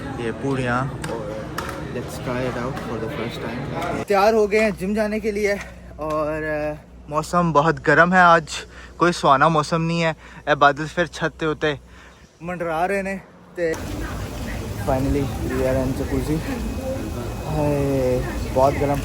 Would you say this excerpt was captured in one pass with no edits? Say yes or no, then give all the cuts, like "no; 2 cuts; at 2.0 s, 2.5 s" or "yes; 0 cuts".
no; 2 cuts; at 4.0 s, 13.7 s